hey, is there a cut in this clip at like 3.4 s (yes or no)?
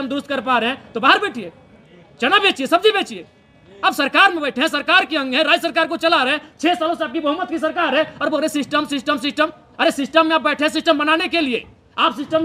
no